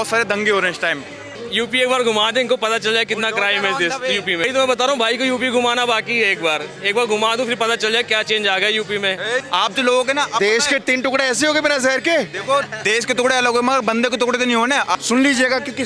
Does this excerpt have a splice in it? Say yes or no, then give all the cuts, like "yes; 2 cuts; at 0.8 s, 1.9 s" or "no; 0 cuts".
yes; 4 cuts; at 1.3 s, 4.4 s, 9.5 s, 14.9 s